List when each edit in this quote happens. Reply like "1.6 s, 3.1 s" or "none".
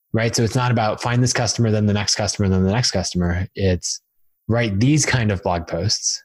none